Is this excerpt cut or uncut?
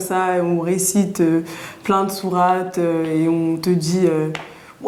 uncut